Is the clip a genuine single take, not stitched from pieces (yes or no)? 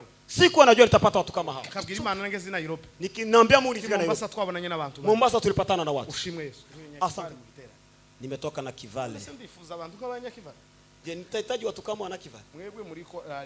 no